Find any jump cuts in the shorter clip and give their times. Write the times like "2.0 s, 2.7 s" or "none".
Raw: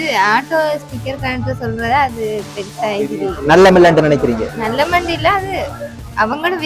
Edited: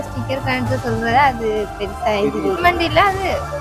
2.6 s